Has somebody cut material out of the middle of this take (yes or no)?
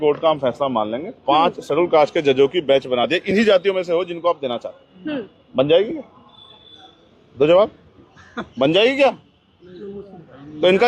no